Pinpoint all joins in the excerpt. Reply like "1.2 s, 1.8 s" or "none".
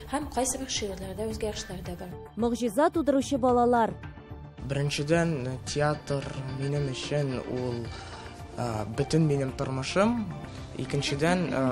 2.1 s